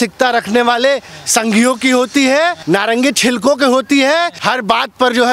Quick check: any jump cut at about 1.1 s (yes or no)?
no